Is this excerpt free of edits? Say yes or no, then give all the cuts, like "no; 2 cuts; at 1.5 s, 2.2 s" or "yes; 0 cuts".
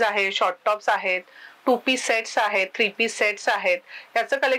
yes; 0 cuts